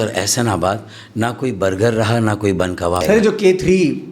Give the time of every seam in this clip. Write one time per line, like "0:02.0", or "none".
0:03.0